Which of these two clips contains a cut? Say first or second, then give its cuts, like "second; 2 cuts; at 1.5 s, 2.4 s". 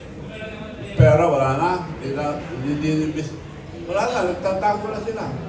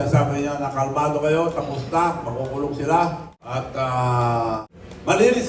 second; 2 cuts; at 3.3 s, 4.6 s